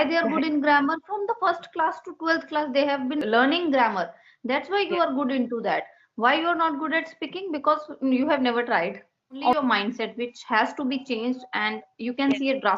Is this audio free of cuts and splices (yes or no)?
no